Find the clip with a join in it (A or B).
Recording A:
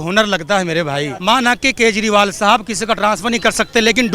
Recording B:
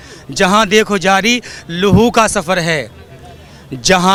A